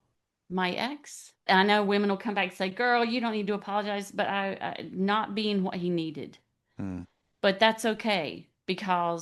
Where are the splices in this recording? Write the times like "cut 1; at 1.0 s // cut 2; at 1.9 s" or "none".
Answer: cut 1; at 1.4 s